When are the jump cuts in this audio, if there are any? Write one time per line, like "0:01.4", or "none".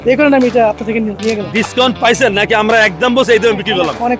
0:01.5